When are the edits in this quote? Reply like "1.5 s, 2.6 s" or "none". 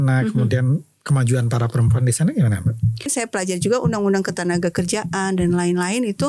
3.1 s